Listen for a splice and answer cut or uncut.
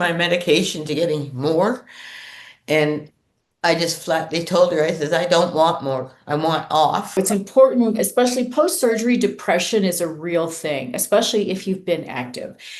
cut